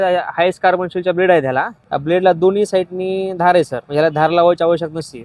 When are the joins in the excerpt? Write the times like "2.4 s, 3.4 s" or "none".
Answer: 1.8 s, 3.8 s